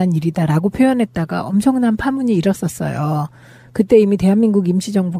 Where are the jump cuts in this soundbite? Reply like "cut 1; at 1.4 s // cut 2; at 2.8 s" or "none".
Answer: none